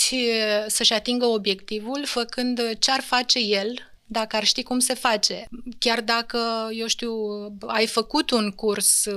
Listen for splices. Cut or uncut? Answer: cut